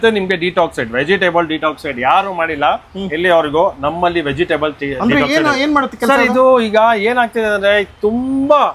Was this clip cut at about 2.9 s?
no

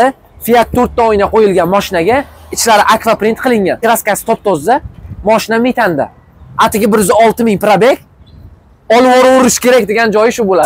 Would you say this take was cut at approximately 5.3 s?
no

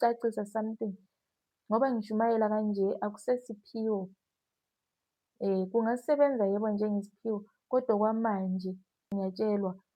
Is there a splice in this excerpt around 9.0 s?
yes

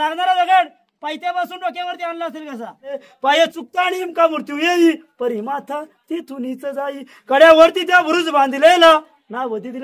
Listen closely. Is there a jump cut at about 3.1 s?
yes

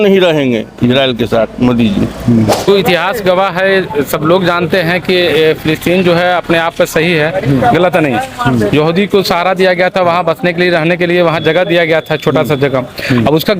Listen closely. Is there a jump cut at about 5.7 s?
no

